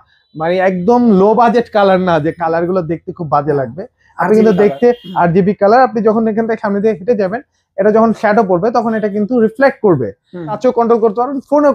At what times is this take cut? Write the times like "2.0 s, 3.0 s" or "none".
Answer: 10.6 s